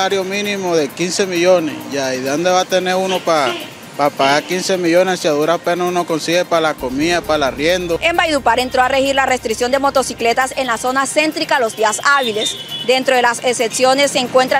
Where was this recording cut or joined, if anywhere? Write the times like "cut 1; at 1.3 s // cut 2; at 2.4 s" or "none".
cut 1; at 8.0 s